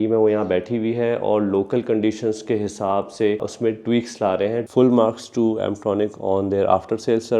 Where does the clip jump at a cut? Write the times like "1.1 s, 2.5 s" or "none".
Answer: 3.5 s, 4.7 s